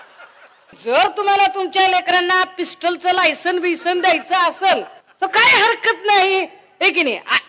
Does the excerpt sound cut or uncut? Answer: cut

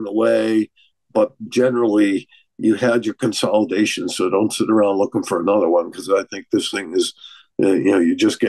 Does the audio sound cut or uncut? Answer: uncut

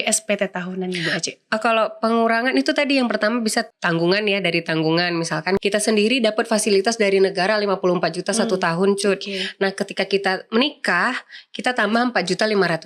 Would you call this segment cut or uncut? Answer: cut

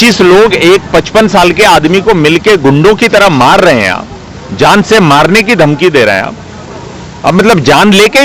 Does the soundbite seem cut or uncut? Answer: uncut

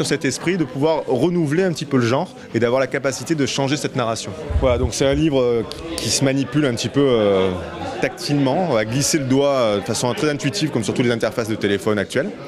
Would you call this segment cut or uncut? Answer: cut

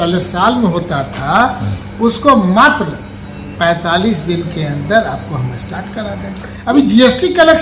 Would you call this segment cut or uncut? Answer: cut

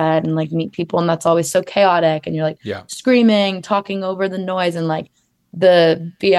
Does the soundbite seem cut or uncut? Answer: uncut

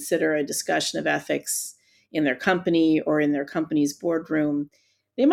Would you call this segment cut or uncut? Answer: uncut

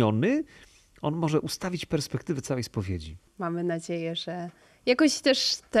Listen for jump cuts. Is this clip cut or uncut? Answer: cut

